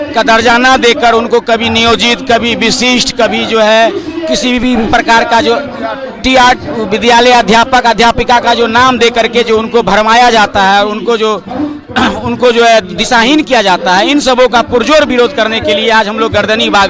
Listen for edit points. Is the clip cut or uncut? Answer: uncut